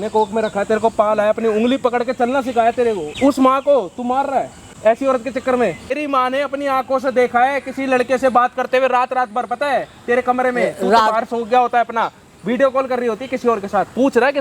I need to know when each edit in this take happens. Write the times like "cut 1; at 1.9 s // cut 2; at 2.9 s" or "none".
cut 1; at 3.1 s // cut 2; at 4.6 s // cut 3; at 6.0 s